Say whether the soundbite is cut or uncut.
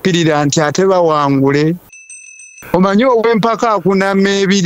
cut